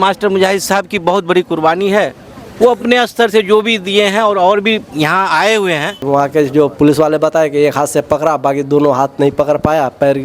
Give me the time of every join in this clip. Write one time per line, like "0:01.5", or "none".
0:06.0